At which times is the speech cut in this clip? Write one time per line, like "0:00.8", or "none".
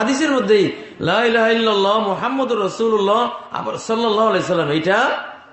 none

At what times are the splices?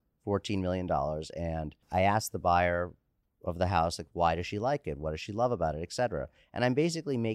0:01.7

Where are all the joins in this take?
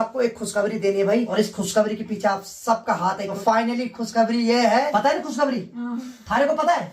0:01.3
0:03.3
0:04.9

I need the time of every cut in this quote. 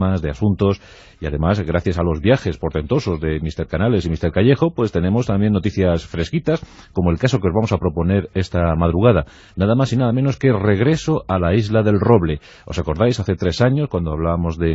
0:12.8

